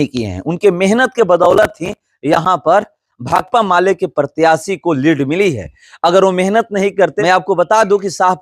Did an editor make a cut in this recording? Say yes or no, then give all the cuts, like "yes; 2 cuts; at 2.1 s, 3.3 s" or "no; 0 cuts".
yes; 1 cut; at 7.2 s